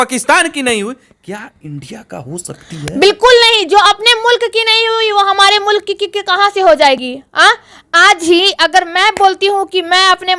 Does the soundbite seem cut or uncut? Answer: uncut